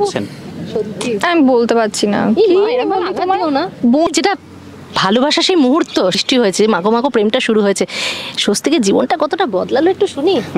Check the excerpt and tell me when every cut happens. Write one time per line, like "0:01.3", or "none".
0:04.1
0:06.2